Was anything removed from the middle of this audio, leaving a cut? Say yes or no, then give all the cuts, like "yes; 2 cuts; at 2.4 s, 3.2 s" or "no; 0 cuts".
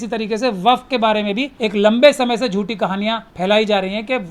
yes; 2 cuts; at 1.5 s, 3.3 s